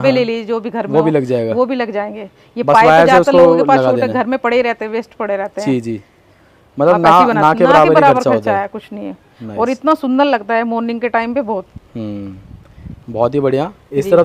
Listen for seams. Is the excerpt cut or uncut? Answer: uncut